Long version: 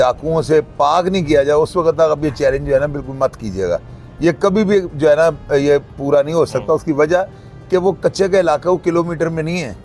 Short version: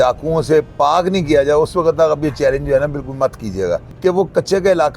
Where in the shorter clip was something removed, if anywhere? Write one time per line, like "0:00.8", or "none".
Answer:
0:03.9